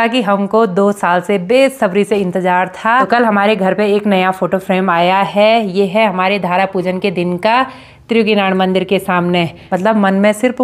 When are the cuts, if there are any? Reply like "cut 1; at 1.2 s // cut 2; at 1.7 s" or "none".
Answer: cut 1; at 3.1 s // cut 2; at 9.6 s